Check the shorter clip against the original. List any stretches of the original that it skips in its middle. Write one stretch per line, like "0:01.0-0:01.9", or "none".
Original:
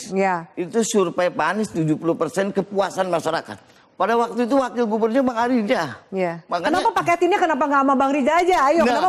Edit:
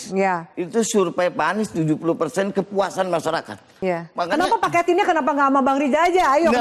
0:03.7-0:06.0